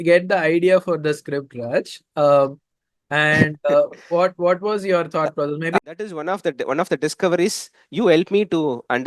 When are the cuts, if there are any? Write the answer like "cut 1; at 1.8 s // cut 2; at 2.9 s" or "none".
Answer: cut 1; at 5.8 s